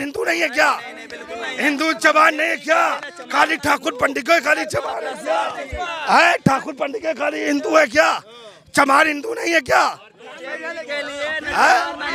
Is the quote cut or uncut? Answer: uncut